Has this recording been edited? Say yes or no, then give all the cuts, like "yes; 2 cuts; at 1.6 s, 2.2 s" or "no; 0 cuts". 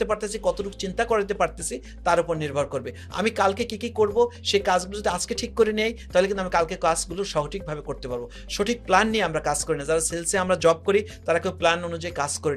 no; 0 cuts